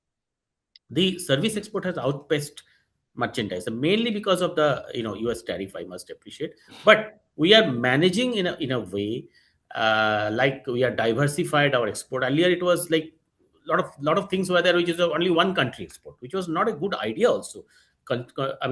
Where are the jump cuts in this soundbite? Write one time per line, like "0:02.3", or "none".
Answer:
none